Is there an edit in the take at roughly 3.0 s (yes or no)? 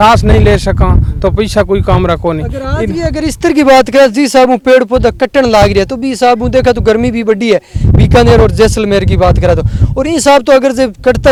no